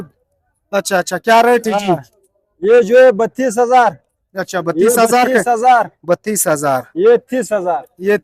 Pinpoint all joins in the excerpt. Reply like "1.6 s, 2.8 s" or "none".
none